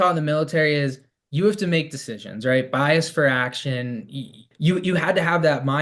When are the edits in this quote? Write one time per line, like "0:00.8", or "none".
0:04.5